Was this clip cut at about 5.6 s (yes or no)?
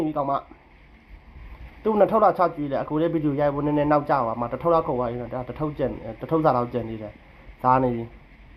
no